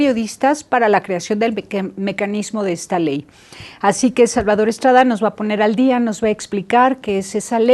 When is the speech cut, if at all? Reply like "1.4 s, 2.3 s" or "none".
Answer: 3.2 s